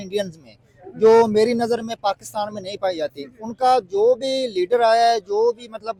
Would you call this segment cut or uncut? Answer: uncut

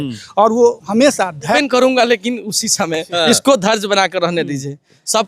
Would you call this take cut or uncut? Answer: cut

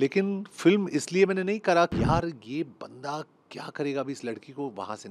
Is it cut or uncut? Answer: cut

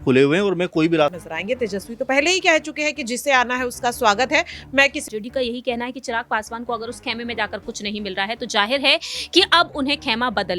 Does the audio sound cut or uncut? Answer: cut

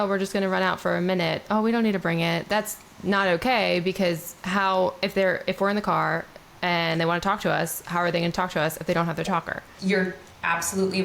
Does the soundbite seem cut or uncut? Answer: cut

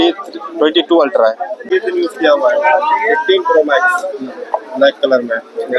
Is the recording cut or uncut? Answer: cut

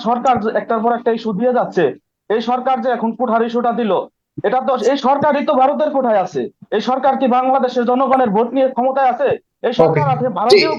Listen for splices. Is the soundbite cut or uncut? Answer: uncut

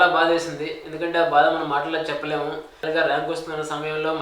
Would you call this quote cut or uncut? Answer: cut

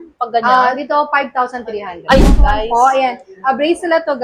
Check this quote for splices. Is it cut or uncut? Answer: cut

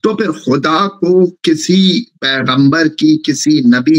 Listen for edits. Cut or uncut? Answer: uncut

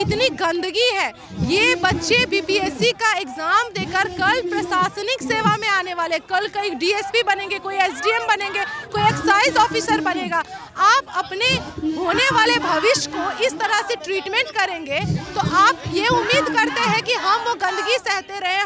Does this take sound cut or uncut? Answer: uncut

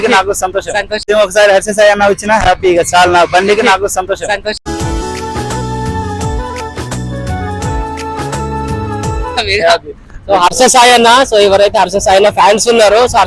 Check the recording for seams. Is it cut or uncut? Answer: uncut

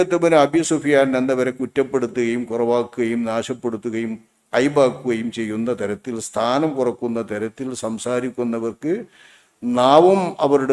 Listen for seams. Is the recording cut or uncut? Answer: uncut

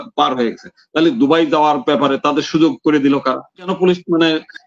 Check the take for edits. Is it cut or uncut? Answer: cut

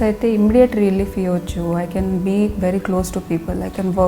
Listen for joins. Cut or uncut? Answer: uncut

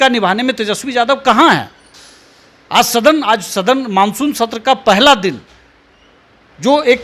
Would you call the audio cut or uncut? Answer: uncut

